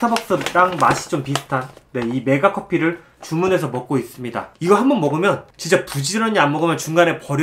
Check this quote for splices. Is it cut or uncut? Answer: uncut